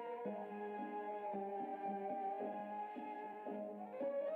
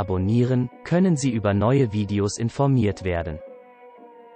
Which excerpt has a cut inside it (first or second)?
second